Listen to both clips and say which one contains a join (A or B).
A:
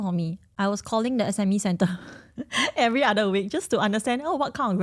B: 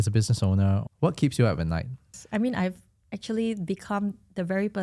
B